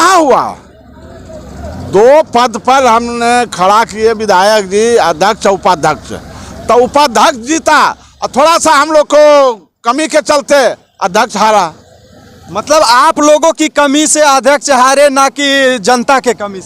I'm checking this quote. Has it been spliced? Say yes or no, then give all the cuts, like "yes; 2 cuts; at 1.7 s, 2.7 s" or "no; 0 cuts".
no; 0 cuts